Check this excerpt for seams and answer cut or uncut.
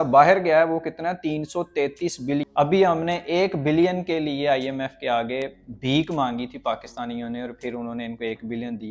cut